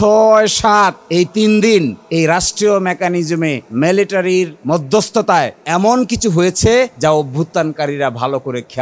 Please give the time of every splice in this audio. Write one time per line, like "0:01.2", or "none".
0:01.0
0:02.0
0:03.6
0:04.6
0:05.6
0:06.9